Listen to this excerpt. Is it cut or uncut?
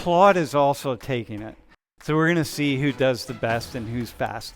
uncut